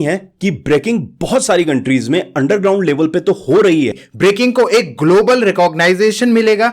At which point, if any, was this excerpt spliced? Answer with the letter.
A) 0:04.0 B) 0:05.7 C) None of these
A